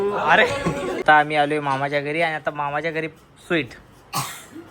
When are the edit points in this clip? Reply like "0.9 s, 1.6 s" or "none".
1.0 s